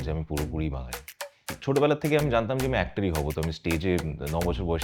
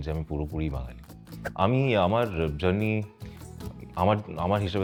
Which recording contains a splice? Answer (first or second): first